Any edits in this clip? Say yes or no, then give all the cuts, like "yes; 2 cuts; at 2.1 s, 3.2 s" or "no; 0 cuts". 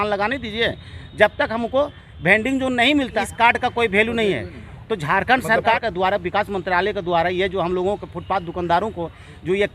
yes; 2 cuts; at 3.1 s, 5.8 s